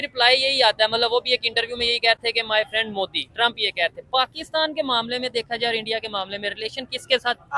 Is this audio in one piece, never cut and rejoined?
yes; 0 cuts

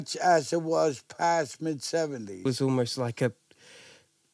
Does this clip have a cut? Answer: yes; 1 cut; at 2.4 s

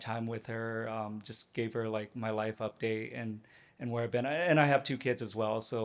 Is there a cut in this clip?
no; 0 cuts

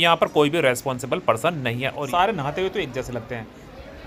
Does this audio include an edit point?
yes; 1 cut; at 2.1 s

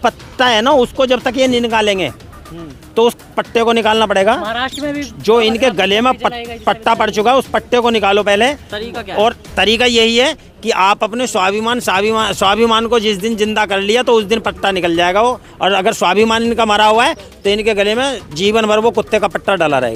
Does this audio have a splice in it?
no; 0 cuts

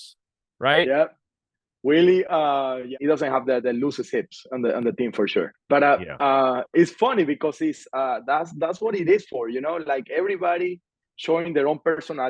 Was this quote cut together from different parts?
yes; 2 cuts; at 3.0 s, 5.6 s

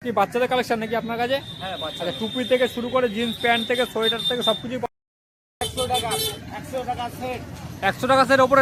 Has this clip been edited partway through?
yes; 1 cut; at 4.8 s

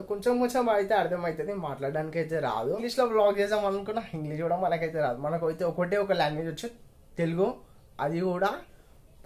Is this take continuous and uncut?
yes; 0 cuts

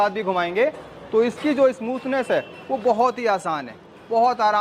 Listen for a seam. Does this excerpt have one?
no; 0 cuts

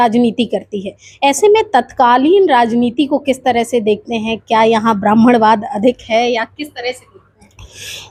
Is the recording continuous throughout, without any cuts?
yes; 0 cuts

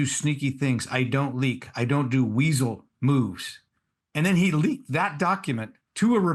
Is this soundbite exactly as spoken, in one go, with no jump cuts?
yes; 0 cuts

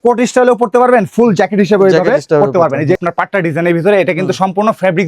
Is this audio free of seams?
no; 1 cut; at 3.0 s

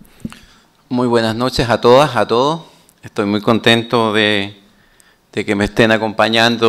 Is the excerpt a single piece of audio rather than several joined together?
yes; 0 cuts

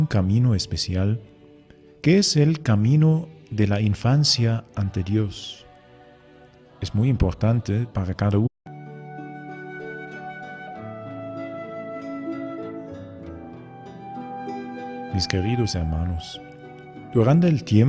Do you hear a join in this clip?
no; 0 cuts

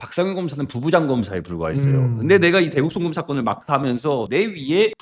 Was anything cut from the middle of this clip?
no; 0 cuts

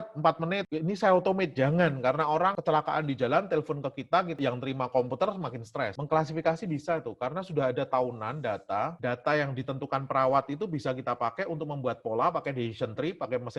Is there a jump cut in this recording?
yes; 2 cuts; at 2.6 s, 6.0 s

